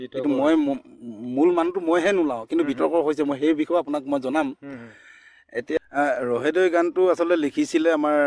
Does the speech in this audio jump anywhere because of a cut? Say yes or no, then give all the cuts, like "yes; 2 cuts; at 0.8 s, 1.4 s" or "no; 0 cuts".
yes; 1 cut; at 5.9 s